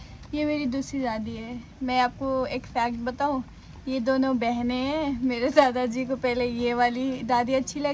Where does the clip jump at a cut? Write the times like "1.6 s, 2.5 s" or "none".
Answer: none